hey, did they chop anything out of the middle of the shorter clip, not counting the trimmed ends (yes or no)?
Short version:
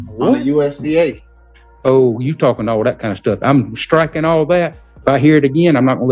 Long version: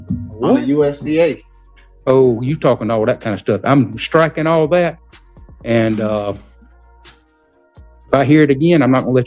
yes